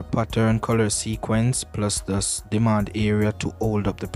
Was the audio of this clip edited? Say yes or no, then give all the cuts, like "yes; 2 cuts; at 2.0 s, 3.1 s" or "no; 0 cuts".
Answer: no; 0 cuts